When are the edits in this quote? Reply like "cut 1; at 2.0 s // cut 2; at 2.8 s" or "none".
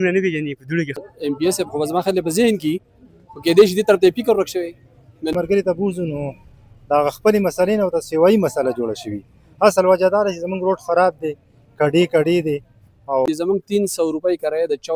cut 1; at 1.1 s // cut 2; at 5.3 s // cut 3; at 13.3 s